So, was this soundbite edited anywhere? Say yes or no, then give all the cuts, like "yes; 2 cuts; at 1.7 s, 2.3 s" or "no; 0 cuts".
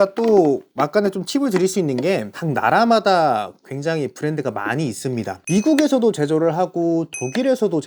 yes; 2 cuts; at 2.4 s, 5.4 s